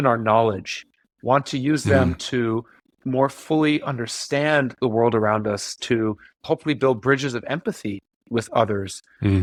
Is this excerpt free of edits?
yes; 0 cuts

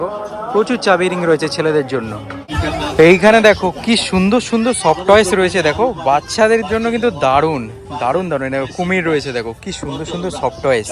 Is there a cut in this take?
no; 0 cuts

